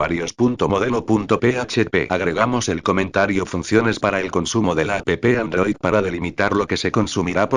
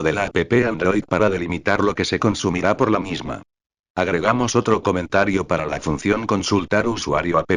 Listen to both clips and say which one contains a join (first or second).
first